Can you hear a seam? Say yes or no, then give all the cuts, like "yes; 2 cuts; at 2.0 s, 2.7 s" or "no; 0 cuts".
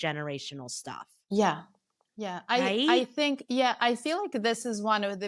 no; 0 cuts